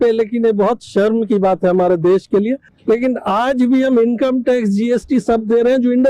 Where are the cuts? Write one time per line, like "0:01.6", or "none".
0:02.7